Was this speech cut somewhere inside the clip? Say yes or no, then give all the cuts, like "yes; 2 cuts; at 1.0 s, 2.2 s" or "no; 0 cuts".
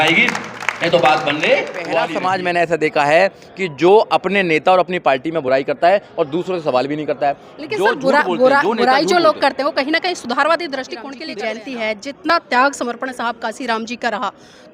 yes; 2 cuts; at 1.9 s, 11.1 s